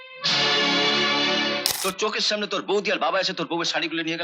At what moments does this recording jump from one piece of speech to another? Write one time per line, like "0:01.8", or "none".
0:01.7